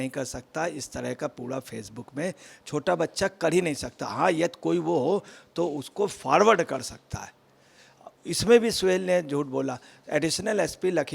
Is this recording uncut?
yes; 0 cuts

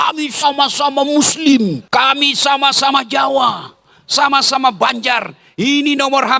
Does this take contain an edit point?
yes; 1 cut; at 1.8 s

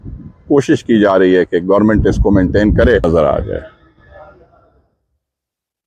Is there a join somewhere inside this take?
yes; 1 cut; at 3.0 s

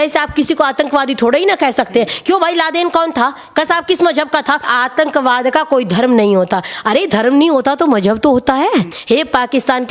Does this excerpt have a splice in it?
yes; 2 cuts; at 4.7 s, 9.0 s

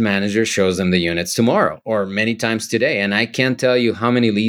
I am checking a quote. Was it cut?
no; 0 cuts

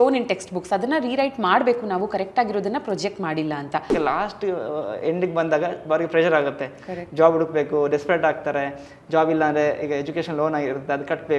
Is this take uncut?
no; 1 cut; at 3.9 s

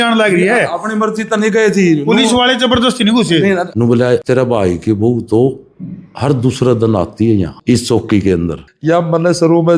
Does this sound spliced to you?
yes; 3 cuts; at 3.7 s, 7.5 s, 8.6 s

